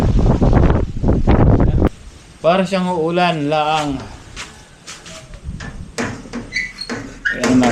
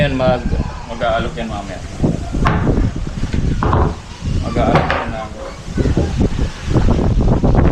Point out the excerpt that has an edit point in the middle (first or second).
first